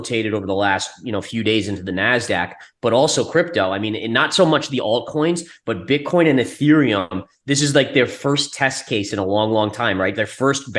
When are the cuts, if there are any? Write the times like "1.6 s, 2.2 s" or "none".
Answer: none